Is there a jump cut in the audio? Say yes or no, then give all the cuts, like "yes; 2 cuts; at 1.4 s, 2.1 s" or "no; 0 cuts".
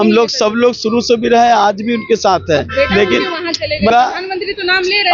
yes; 1 cut; at 3.9 s